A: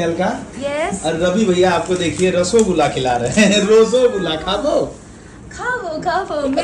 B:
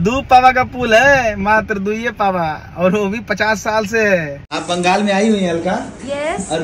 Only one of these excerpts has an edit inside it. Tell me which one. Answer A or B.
B